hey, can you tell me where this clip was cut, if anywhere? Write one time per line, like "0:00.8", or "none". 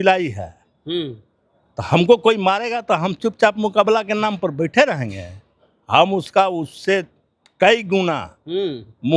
none